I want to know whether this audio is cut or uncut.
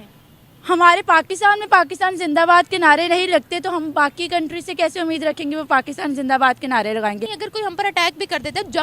cut